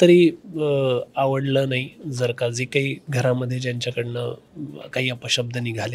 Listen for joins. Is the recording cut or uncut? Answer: uncut